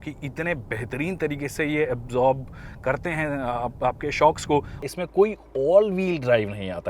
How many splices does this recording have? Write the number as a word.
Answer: one